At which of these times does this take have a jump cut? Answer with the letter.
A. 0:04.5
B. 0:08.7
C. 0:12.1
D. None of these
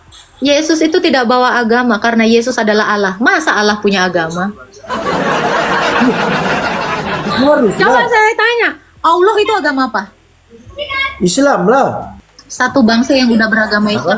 C